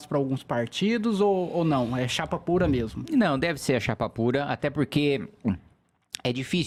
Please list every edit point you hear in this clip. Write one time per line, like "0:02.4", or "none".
none